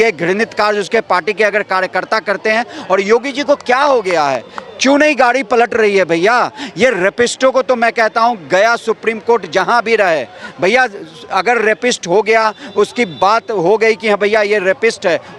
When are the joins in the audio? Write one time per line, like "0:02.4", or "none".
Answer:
none